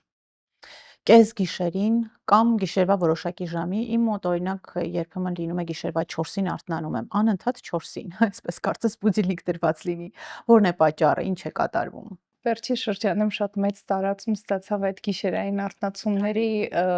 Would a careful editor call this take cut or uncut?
uncut